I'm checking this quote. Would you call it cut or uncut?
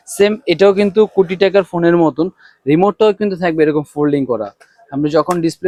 uncut